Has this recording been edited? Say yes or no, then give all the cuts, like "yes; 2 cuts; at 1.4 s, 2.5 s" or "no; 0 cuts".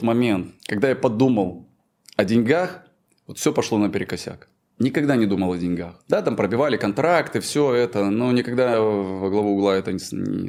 no; 0 cuts